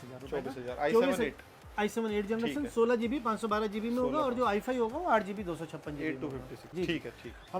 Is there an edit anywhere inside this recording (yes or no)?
yes